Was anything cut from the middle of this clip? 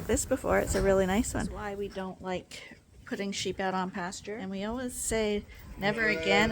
yes; 2 cuts; at 1.5 s, 4.3 s

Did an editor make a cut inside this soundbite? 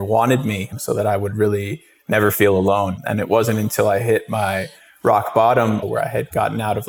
no; 0 cuts

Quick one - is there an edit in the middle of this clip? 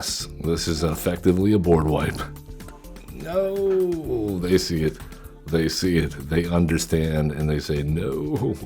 no; 0 cuts

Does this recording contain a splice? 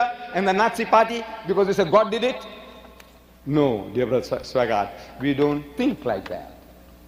no; 0 cuts

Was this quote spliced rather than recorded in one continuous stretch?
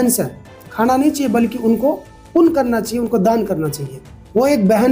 no; 0 cuts

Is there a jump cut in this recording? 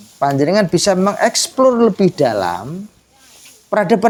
no; 0 cuts

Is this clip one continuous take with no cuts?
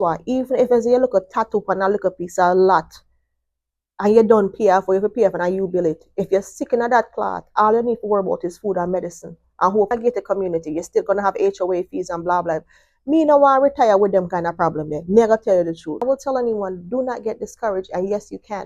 no; 2 cuts; at 9.9 s, 16.0 s

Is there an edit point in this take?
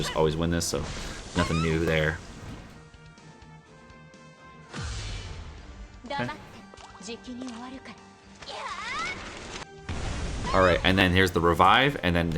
no; 0 cuts

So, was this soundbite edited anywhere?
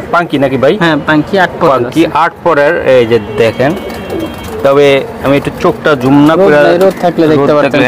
no; 0 cuts

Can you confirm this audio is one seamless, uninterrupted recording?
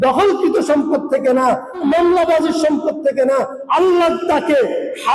no; 2 cuts; at 1.8 s, 3.6 s

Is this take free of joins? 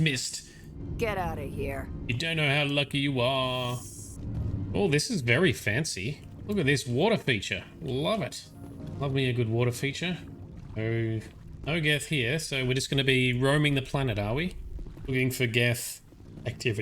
yes; 0 cuts

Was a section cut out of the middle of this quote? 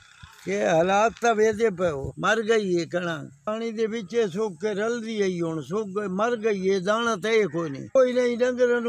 yes; 3 cuts; at 2.0 s, 3.5 s, 8.0 s

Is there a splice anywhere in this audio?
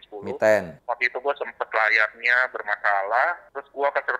no; 0 cuts

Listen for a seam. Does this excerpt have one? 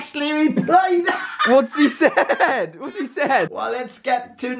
yes; 1 cut; at 3.6 s

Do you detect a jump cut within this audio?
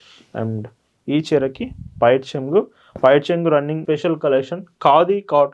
yes; 1 cut; at 3.8 s

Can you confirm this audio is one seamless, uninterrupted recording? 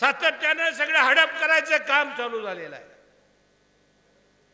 yes; 0 cuts

